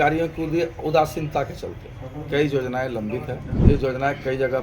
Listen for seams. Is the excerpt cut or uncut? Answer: cut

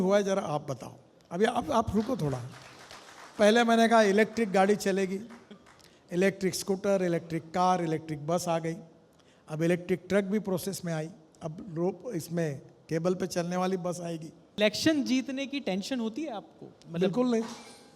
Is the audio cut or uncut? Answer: cut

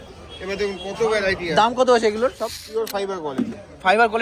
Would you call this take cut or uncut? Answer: cut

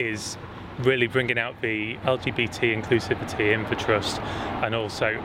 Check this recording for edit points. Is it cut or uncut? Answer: cut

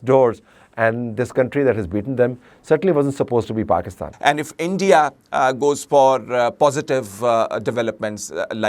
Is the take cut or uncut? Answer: cut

